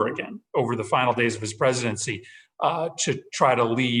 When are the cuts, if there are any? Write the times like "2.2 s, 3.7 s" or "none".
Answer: none